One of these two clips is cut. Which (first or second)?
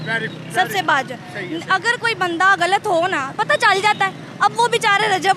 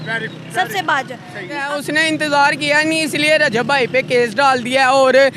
second